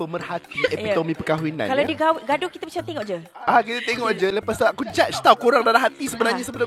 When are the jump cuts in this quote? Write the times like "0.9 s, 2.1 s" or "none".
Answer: none